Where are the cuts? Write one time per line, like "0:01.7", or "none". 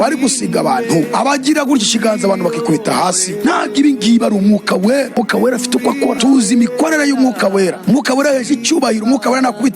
0:06.2